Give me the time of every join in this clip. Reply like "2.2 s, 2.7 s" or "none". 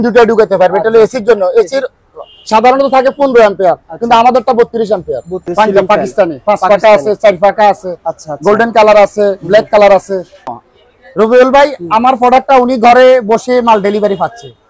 5.5 s, 10.4 s